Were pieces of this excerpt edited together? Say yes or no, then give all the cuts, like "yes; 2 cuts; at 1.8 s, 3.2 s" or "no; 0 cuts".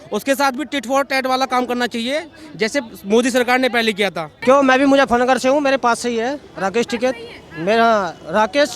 yes; 1 cut; at 4.3 s